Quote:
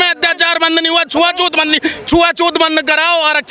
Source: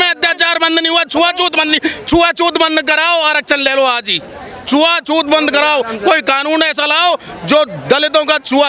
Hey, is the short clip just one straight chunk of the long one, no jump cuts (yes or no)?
yes